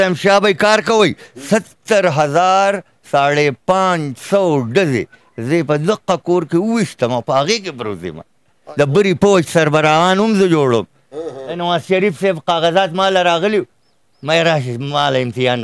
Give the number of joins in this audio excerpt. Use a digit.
3